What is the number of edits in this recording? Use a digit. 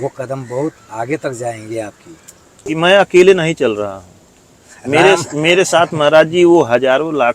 1